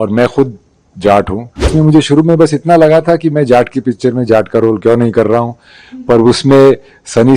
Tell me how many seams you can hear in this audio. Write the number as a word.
one